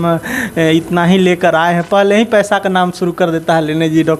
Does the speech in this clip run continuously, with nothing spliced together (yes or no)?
yes